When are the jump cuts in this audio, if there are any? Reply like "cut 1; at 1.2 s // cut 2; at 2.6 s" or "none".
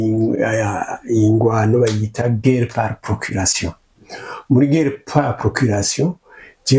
none

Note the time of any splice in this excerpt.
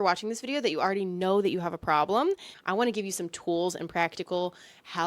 cut 1; at 2.5 s

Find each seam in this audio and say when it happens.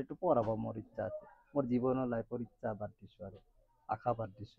none

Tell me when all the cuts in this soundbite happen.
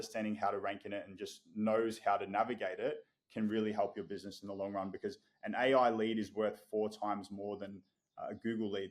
none

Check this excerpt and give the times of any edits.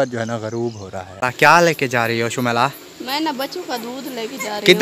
cut 1; at 1.1 s

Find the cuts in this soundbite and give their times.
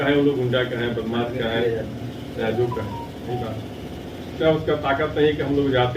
cut 1; at 4.4 s

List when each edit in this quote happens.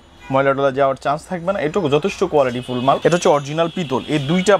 cut 1; at 3.0 s

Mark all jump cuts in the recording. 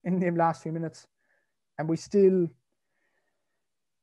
none

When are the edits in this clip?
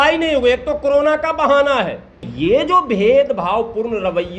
cut 1; at 2.2 s

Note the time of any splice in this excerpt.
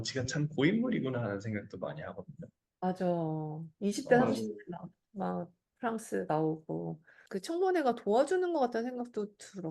cut 1; at 7.4 s

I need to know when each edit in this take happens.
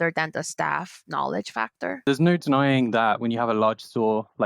cut 1; at 2.0 s

